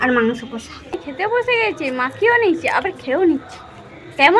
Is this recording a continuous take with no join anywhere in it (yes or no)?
no